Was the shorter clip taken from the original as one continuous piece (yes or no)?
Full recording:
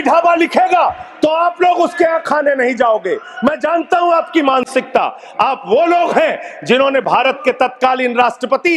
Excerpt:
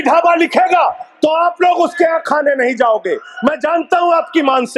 yes